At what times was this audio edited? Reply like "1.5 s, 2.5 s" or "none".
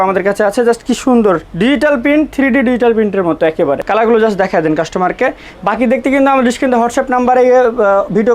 3.8 s